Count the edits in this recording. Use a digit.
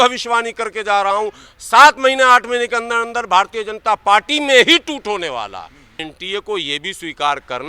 1